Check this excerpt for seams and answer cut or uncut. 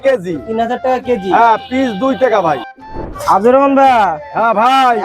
cut